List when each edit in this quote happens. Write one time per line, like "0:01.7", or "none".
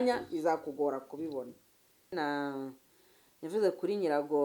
0:02.1